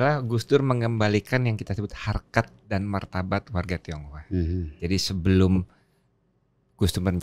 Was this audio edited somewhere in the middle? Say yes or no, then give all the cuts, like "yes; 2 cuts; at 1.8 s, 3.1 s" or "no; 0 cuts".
no; 0 cuts